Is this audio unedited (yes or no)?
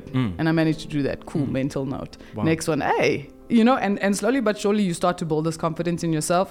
yes